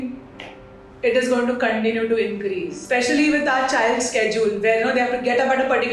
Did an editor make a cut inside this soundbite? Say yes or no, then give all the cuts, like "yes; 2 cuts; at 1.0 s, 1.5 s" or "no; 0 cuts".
yes; 1 cut; at 2.7 s